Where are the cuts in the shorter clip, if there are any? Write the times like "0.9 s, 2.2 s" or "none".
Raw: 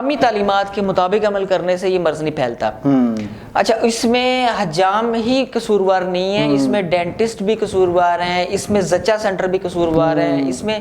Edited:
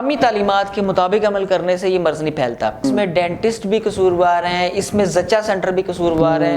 2.8 s